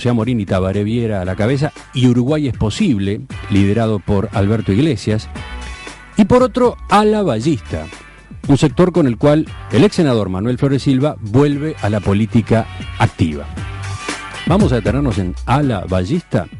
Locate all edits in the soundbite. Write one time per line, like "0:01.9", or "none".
none